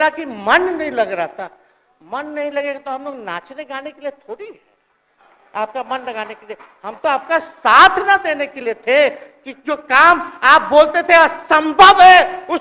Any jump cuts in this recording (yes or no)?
no